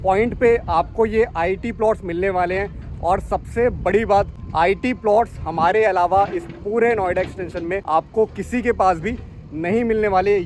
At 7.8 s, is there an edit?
yes; 2 cuts; at 4.4 s, 7.8 s

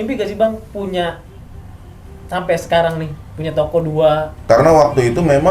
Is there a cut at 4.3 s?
yes; 1 cut; at 4.3 s

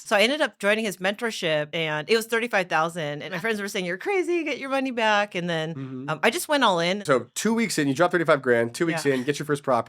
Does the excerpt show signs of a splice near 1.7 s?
yes; 3 cuts; at 1.7 s, 3.2 s, 7.0 s

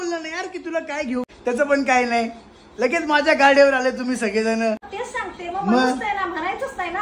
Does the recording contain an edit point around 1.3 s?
yes; 2 cuts; at 1.3 s, 4.9 s

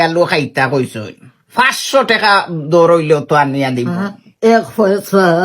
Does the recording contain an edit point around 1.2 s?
no; 1 cut; at 4.2 s

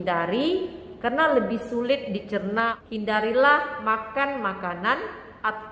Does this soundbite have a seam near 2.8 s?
yes; 1 cut; at 2.8 s

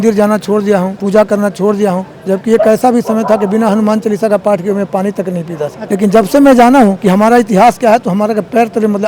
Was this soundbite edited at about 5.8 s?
yes; 3 cuts; at 1.0 s, 5.8 s, 7.0 s

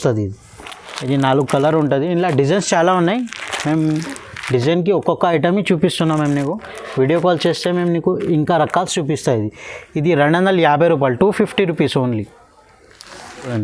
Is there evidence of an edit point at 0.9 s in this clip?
no; 0 cuts

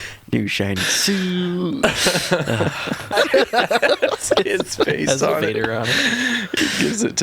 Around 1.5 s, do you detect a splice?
no; 1 cut; at 3.1 s

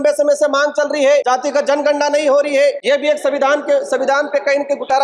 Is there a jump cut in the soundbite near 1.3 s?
yes; 2 cuts; at 1.3 s, 2.8 s

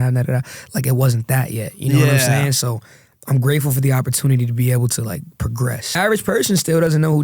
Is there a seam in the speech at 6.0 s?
yes; 1 cut; at 6.0 s

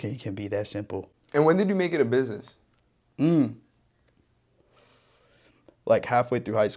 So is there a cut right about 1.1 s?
no; 0 cuts

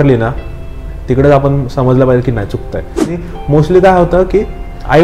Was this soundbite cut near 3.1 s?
yes; 1 cut; at 3.1 s

